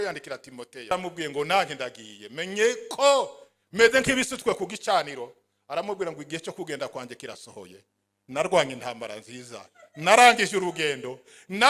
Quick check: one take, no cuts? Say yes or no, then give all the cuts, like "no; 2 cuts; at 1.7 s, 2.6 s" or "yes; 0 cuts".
no; 1 cut; at 0.9 s